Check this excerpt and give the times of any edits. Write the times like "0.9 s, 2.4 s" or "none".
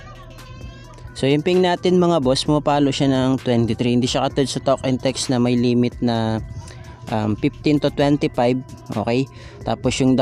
none